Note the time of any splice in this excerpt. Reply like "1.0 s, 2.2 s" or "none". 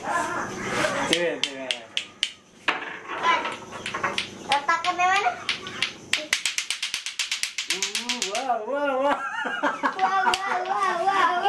9.0 s